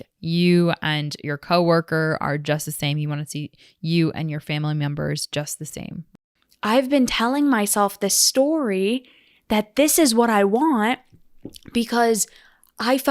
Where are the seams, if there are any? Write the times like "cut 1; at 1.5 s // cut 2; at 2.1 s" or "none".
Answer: cut 1; at 6.1 s